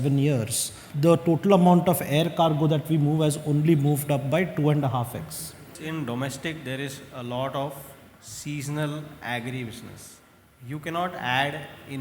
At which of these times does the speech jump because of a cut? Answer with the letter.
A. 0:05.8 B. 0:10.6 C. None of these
A